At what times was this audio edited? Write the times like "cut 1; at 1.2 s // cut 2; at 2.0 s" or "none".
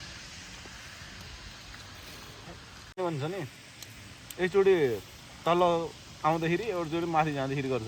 cut 1; at 2.9 s